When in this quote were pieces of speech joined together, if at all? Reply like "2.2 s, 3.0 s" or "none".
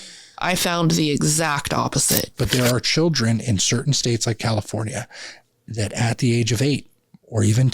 2.3 s